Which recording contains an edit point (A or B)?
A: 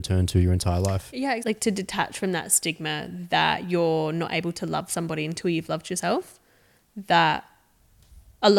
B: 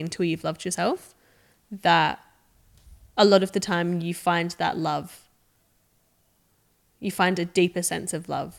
A